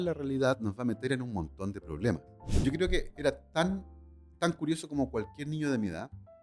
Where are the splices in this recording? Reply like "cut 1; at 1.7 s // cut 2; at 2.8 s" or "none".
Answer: cut 1; at 2.5 s